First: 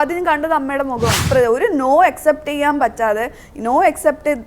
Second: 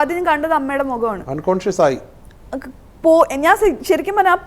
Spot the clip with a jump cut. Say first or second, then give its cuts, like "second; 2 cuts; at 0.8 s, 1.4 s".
first; 1 cut; at 1.2 s